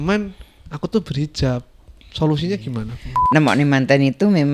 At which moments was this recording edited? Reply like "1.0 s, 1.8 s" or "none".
3.2 s